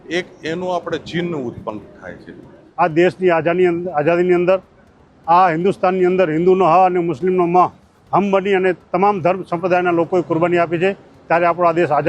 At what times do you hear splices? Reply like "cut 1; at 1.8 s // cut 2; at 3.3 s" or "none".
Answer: cut 1; at 2.6 s